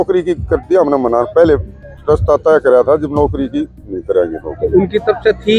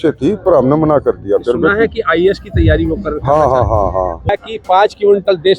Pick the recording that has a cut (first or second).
second